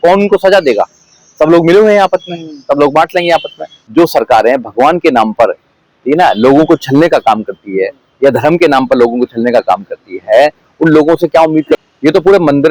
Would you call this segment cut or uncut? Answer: cut